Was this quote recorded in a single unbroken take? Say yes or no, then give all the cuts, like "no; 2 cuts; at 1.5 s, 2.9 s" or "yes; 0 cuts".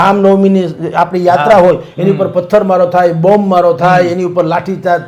yes; 0 cuts